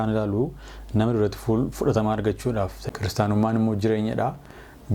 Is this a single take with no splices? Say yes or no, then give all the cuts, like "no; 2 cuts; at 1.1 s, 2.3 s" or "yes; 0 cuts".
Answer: no; 1 cut; at 2.8 s